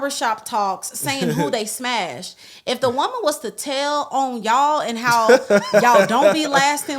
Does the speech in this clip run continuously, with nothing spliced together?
yes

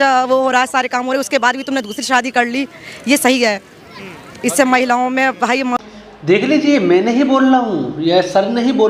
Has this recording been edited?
no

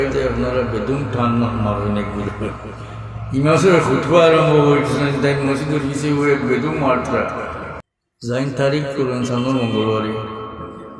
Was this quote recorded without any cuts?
no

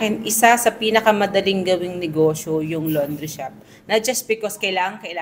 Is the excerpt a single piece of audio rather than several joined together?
yes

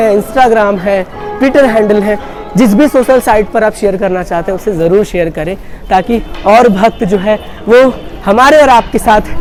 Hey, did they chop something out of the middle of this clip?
no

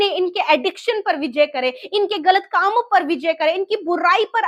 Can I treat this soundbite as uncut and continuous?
yes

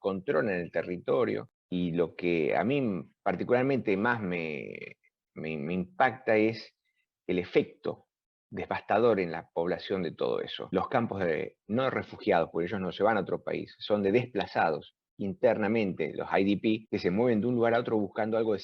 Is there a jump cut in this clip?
yes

